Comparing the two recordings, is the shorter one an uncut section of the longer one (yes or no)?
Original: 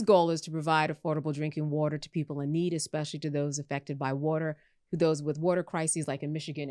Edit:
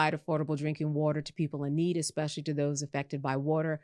yes